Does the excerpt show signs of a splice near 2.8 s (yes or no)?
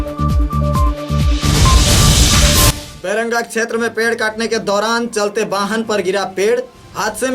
yes